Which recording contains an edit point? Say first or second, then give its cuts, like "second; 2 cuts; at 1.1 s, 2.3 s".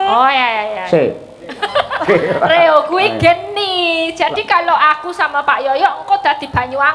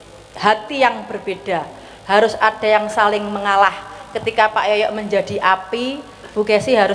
first; 1 cut; at 2.0 s